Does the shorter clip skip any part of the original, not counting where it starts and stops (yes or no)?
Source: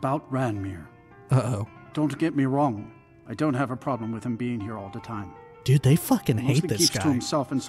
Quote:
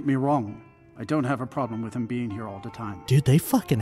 yes